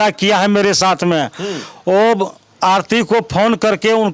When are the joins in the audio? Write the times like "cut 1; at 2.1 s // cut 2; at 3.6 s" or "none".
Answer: none